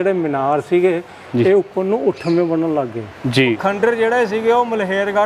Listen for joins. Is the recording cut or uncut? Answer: cut